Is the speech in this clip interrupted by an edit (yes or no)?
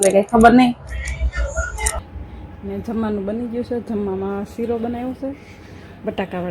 yes